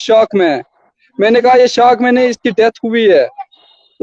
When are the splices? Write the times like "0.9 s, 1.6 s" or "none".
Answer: none